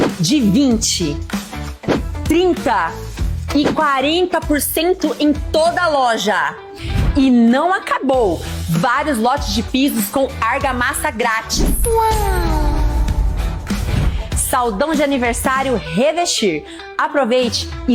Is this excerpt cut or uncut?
uncut